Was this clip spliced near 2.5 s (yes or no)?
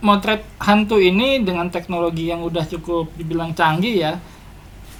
no